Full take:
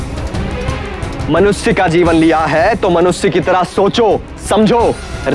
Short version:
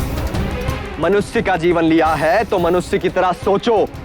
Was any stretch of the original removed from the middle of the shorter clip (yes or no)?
yes